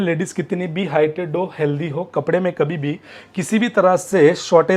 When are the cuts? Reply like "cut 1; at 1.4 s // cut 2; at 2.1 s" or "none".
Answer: none